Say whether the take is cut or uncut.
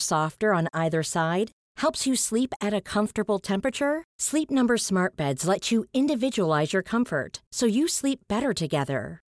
uncut